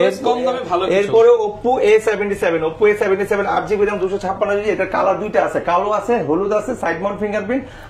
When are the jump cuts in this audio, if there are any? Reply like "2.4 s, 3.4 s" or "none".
none